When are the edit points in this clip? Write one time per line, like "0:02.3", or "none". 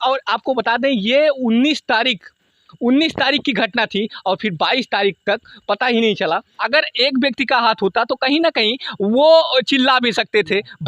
0:06.5